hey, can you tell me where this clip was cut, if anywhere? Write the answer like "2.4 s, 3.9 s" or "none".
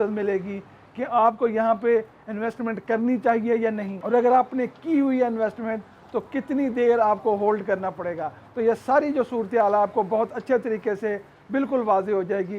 3.9 s